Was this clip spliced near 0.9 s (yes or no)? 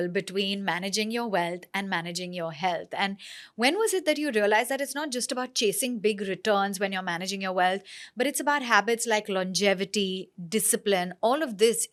no